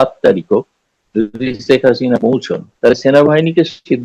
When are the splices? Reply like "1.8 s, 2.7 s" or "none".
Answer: 2.8 s